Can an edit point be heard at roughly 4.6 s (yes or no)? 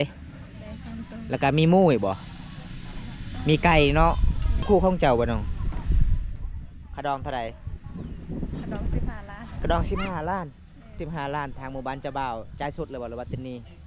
yes